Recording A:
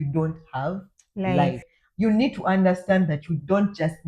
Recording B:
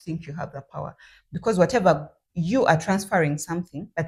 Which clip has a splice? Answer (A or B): A